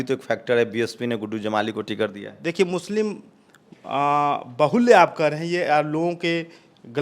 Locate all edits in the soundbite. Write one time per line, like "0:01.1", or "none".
none